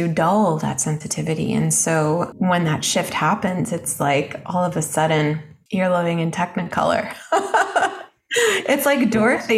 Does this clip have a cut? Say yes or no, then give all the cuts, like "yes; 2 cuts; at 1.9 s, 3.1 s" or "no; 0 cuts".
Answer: yes; 2 cuts; at 2.3 s, 5.5 s